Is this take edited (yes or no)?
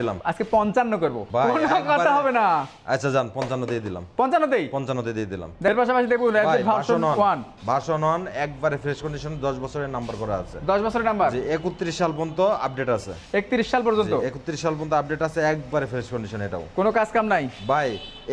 no